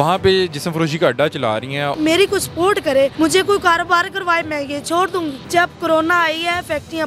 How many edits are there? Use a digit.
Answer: 3